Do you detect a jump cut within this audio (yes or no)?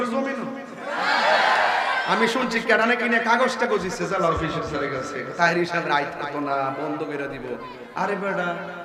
no